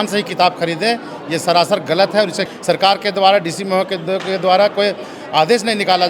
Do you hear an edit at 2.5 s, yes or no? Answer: yes